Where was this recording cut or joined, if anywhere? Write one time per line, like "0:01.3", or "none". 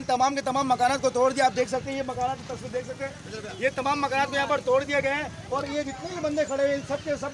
none